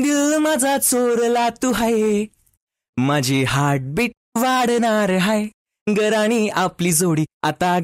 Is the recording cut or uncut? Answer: uncut